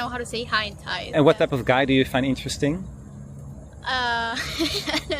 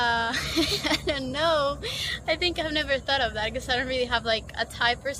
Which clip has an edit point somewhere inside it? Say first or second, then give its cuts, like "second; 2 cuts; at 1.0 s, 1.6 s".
first; 1 cut; at 1.1 s